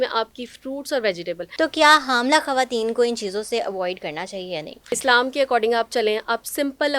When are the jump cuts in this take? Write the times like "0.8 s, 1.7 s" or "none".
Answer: 1.4 s, 4.9 s